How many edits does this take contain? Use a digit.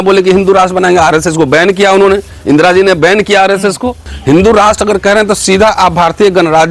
1